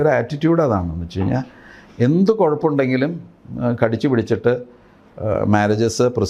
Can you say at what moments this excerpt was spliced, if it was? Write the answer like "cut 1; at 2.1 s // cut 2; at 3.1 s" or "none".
none